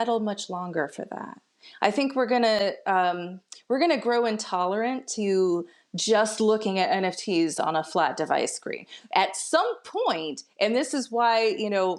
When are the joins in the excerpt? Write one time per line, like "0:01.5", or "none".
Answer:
none